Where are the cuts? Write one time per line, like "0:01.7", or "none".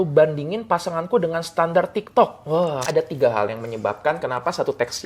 0:02.8